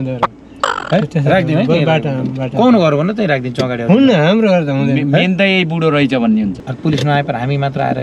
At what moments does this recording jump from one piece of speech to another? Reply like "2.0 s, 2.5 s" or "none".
6.6 s